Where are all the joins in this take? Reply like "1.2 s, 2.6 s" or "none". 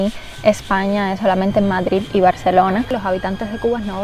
2.9 s